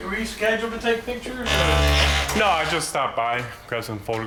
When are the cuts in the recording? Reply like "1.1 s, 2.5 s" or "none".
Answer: none

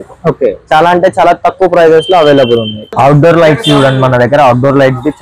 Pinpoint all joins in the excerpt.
2.8 s

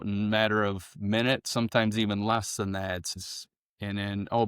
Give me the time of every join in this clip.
3.1 s

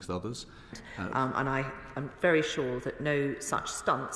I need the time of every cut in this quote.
1.1 s

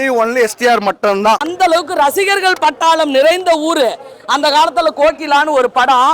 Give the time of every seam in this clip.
1.5 s

